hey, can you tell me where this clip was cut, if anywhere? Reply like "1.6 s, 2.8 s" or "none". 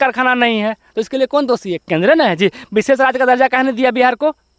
none